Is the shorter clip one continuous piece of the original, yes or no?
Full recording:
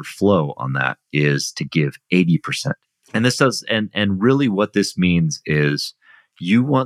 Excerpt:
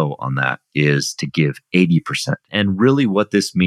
no